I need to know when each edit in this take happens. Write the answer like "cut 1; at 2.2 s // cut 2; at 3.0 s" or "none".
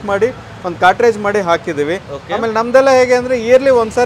none

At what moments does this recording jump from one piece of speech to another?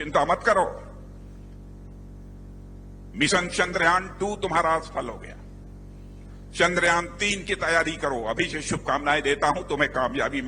cut 1; at 0.9 s // cut 2; at 3.1 s

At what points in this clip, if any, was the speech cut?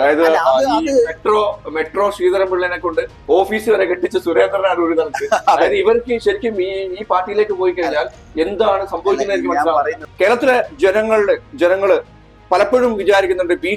cut 1; at 10.0 s

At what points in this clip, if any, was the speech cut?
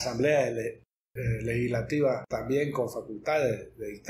cut 1; at 2.2 s

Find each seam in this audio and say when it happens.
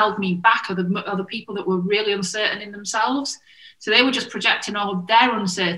none

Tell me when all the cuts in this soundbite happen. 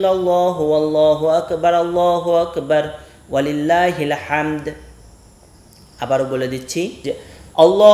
cut 1; at 7.0 s

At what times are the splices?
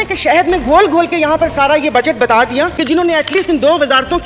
cut 1; at 2.8 s

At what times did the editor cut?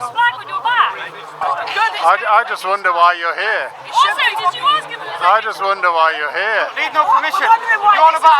cut 1; at 1.3 s

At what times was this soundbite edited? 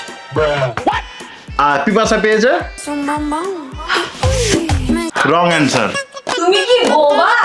none

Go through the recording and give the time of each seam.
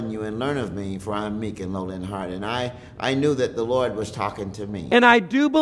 cut 1; at 4.7 s

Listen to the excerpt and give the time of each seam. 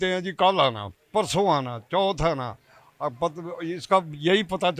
none

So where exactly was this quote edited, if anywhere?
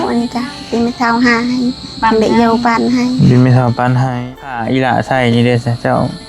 cut 1; at 4.3 s

